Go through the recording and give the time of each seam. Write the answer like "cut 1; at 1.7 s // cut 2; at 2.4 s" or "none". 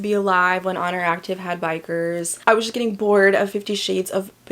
cut 1; at 2.3 s